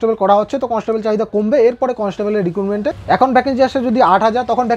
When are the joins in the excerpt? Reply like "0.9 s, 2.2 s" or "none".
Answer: 2.9 s